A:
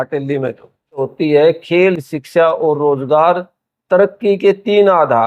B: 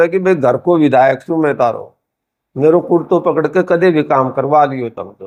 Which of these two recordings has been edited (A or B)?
A